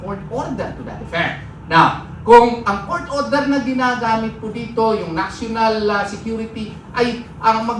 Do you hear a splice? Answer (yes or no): no